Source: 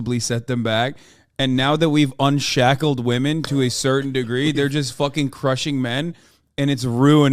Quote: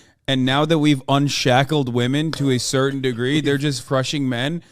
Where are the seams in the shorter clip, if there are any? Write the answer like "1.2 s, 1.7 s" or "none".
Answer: 3.8 s